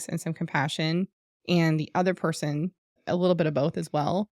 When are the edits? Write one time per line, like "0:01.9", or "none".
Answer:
none